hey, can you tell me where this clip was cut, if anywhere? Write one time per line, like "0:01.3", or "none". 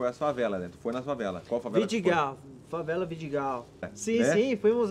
0:03.9